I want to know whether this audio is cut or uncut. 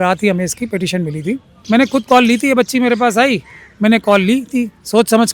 cut